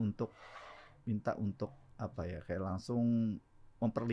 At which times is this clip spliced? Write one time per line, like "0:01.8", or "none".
none